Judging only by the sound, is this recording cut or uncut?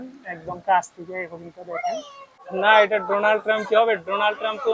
cut